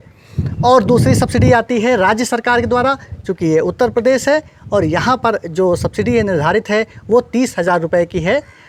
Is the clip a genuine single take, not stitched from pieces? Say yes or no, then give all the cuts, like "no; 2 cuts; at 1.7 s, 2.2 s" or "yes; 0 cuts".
yes; 0 cuts